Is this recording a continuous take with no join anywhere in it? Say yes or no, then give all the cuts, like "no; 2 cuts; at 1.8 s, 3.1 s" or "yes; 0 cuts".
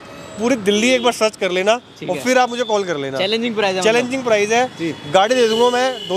yes; 0 cuts